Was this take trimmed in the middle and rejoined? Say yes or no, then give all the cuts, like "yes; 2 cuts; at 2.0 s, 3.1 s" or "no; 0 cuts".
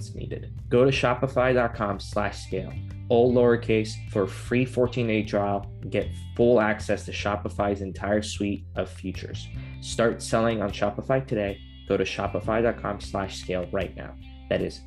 no; 0 cuts